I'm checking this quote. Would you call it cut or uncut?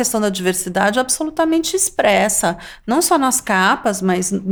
uncut